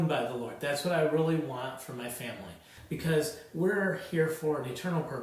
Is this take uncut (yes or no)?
no